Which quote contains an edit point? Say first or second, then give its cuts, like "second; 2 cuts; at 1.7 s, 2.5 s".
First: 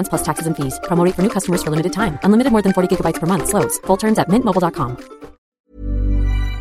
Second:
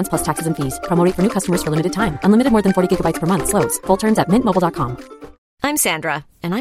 first; 1 cut; at 5.6 s